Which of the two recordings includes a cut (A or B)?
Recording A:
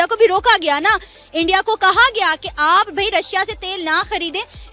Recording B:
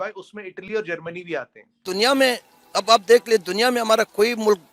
B